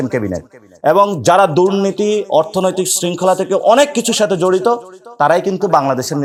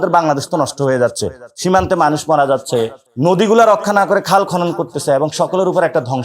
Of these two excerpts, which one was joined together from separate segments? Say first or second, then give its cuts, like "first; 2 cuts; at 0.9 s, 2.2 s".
second; 1 cut; at 3.0 s